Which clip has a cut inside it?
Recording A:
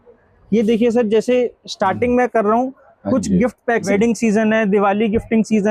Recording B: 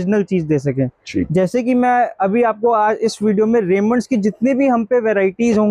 A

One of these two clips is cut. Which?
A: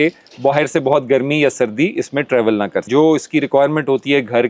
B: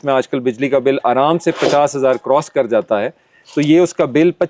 A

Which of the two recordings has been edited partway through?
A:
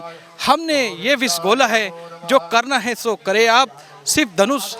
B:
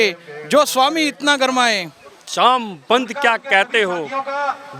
B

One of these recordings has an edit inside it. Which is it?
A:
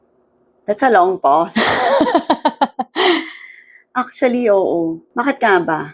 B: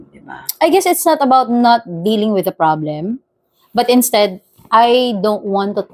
A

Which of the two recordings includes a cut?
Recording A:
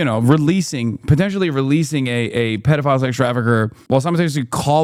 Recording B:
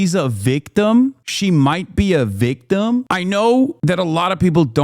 B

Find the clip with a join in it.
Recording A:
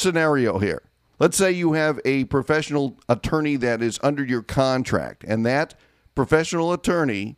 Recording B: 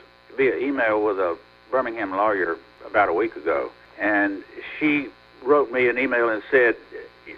B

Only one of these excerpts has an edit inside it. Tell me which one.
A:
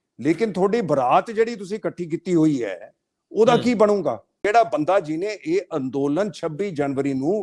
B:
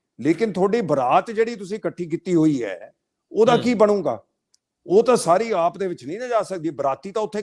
A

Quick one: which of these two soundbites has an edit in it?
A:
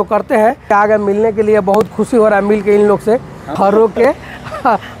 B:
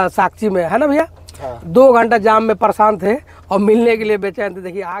A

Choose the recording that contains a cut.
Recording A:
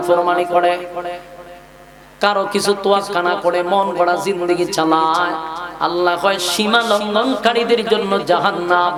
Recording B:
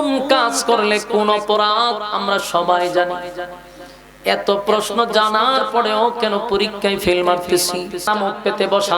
B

